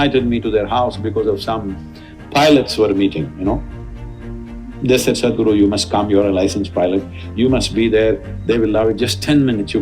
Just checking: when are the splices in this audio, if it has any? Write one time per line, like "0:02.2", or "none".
none